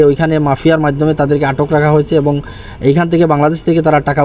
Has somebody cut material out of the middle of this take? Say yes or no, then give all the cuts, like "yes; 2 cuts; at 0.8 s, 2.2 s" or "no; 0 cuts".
no; 0 cuts